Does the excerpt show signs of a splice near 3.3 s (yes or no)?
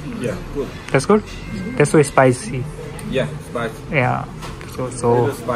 no